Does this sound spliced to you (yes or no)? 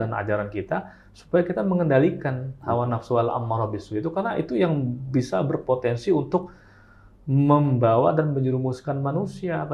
no